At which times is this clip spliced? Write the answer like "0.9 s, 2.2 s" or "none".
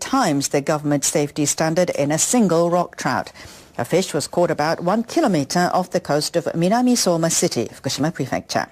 1.0 s